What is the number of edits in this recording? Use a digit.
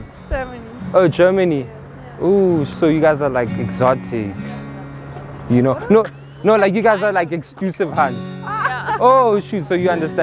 0